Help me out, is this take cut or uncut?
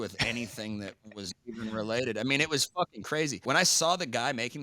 cut